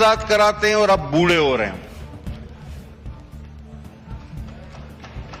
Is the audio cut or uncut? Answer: uncut